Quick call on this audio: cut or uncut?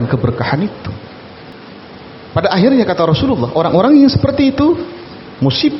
cut